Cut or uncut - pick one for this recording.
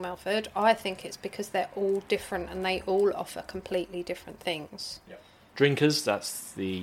cut